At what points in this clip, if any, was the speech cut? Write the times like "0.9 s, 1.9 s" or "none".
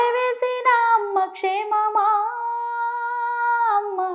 none